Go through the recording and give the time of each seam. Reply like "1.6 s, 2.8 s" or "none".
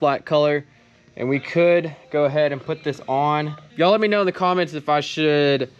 3.6 s

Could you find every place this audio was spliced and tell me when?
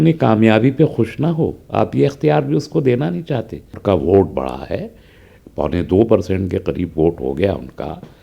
3.8 s

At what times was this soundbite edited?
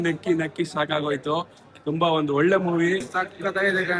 3.1 s

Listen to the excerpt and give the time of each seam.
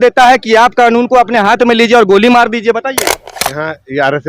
3.3 s

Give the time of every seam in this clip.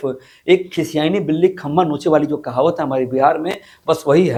none

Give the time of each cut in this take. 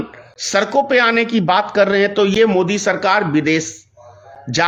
none

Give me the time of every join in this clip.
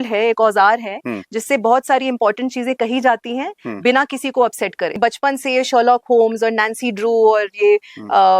5.0 s

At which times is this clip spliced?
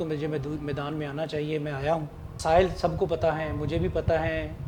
none

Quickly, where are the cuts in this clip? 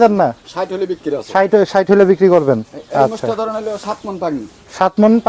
none

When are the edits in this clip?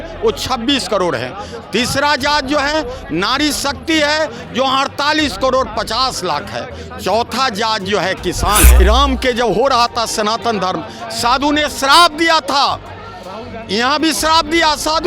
8.7 s

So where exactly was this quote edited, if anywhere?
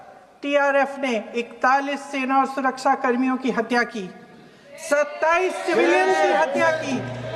none

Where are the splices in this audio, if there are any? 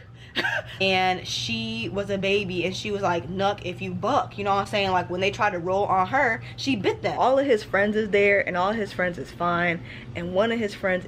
0.8 s, 7.1 s

